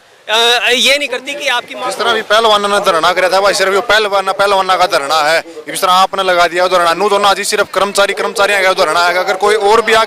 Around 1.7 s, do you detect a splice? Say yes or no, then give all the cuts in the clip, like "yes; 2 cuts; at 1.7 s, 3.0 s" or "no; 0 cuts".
yes; 1 cut; at 1.7 s